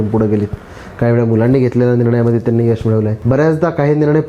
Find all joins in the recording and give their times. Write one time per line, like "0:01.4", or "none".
0:03.2